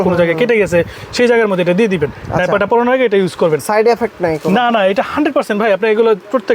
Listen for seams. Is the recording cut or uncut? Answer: uncut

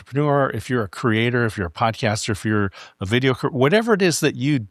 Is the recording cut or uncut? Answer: uncut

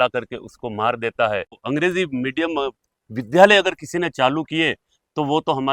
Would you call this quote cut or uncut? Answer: cut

